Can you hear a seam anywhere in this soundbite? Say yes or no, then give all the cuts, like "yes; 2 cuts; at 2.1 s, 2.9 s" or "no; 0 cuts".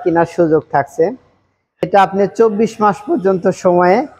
yes; 1 cut; at 1.9 s